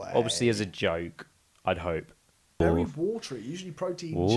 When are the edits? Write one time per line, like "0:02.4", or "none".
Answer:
0:02.6